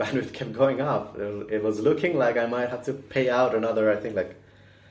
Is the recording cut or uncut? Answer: uncut